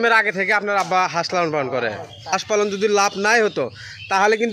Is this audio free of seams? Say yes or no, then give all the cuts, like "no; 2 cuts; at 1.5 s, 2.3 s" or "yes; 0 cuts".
no; 1 cut; at 2.3 s